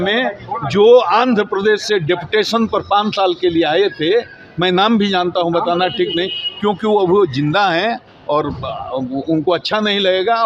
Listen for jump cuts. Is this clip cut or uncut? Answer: uncut